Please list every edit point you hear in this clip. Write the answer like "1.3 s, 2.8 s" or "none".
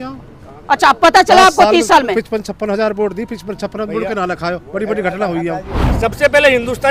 6.0 s